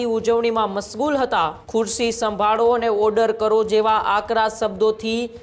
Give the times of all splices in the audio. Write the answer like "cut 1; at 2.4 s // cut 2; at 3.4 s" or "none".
cut 1; at 1.6 s